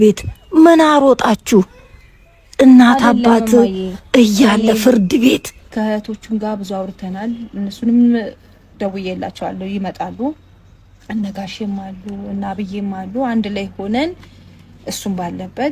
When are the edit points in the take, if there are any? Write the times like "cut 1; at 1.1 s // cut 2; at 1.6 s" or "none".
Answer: cut 1; at 5.7 s